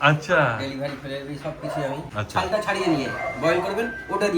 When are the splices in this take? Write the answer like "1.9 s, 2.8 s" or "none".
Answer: 2.1 s